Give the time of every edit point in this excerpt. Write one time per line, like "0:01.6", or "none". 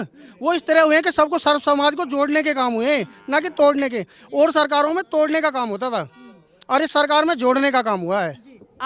none